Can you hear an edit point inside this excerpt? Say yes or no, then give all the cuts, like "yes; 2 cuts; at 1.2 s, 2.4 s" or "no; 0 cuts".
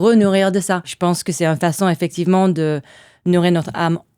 yes; 1 cut; at 0.9 s